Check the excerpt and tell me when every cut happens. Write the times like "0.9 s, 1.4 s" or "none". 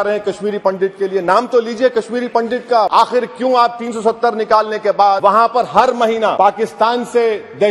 2.9 s, 5.2 s, 6.3 s

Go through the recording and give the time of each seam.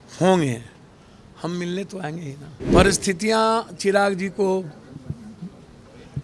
2.6 s

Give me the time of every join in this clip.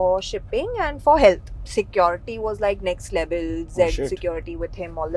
1.6 s

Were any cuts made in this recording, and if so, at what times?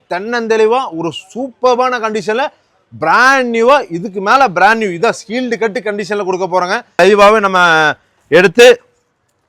7.0 s

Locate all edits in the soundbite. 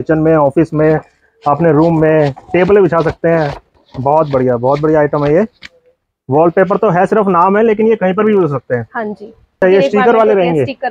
9.6 s

